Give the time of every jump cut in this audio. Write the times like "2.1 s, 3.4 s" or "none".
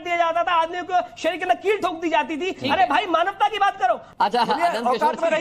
4.1 s